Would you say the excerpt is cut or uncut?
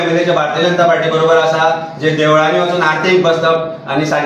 uncut